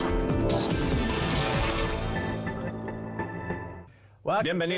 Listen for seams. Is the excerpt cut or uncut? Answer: uncut